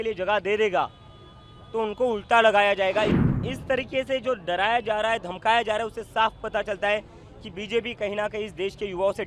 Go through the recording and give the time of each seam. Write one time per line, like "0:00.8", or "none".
0:03.3